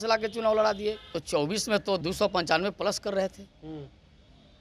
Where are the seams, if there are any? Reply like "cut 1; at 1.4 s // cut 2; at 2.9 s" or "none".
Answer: cut 1; at 1.1 s // cut 2; at 2.0 s